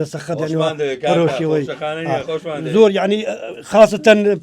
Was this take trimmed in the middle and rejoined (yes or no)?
no